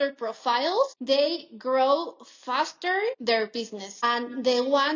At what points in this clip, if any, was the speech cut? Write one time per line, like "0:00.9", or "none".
0:01.0
0:03.5